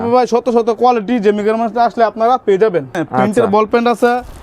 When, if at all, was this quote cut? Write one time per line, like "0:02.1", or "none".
0:02.9